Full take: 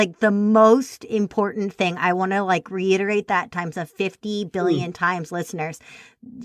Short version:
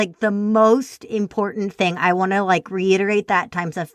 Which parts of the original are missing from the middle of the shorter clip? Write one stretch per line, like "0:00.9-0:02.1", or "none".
none

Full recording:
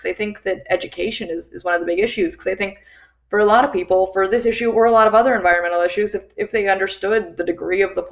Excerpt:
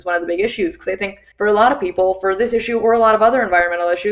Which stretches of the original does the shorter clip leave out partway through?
0:02.8-0:03.1

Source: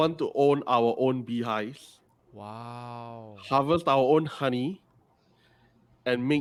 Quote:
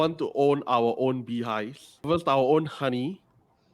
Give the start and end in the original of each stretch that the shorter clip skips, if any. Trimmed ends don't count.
0:02.1-0:03.7

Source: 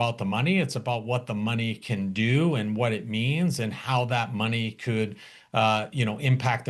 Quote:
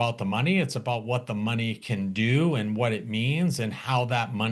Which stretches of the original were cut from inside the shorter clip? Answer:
none

